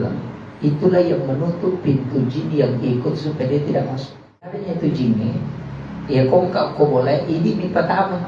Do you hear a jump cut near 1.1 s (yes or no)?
no